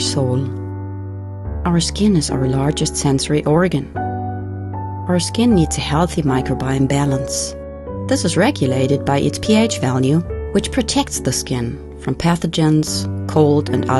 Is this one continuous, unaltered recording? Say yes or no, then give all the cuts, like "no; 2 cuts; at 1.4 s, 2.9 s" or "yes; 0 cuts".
yes; 0 cuts